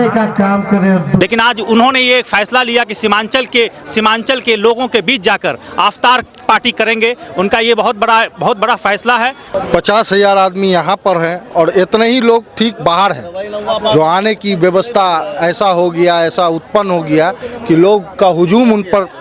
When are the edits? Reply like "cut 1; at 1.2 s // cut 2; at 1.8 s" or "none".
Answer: cut 1; at 1.2 s // cut 2; at 9.4 s